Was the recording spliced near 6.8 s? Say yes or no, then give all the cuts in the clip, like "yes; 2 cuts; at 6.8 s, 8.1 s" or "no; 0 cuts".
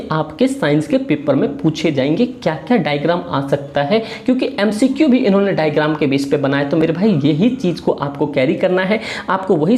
no; 0 cuts